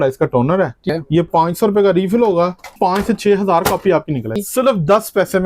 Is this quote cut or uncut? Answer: cut